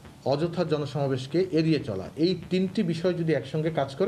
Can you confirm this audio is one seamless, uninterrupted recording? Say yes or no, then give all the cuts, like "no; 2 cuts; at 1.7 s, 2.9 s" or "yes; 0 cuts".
yes; 0 cuts